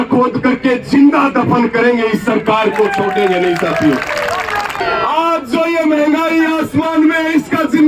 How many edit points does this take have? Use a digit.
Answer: 1